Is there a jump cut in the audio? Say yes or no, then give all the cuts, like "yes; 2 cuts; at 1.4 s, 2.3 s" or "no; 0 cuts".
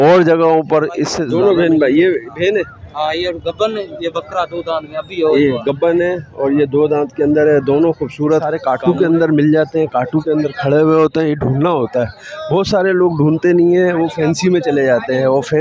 yes; 2 cuts; at 1.2 s, 8.5 s